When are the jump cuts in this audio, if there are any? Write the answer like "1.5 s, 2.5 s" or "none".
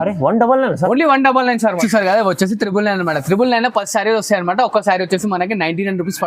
1.8 s